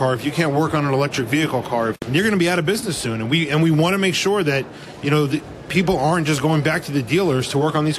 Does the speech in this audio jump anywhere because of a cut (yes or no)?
yes